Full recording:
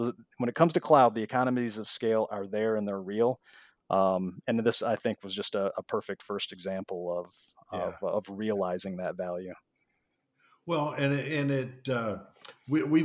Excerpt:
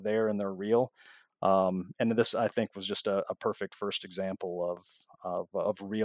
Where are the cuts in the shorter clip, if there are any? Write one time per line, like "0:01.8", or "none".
none